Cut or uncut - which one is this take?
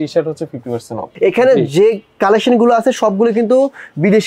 cut